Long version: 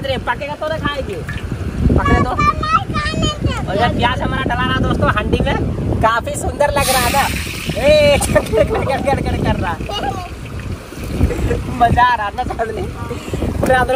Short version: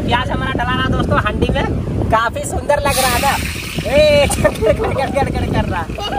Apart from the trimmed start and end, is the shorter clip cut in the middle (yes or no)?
no